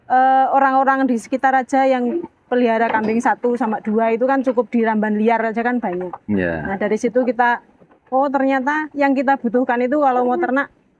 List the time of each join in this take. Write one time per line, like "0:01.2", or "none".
none